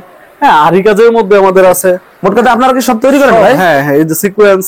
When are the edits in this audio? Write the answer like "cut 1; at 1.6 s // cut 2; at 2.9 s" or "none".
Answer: none